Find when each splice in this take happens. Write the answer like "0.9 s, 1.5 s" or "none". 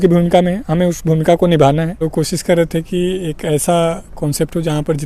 2.0 s